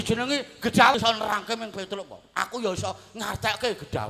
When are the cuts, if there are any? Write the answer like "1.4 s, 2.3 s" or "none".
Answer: 0.9 s